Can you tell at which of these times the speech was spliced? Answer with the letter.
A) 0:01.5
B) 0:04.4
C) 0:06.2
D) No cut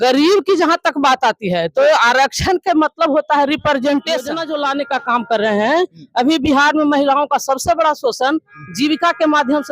B